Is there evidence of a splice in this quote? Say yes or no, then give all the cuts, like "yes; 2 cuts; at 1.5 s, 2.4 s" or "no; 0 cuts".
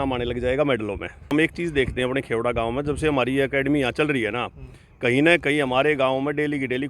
yes; 1 cut; at 1.3 s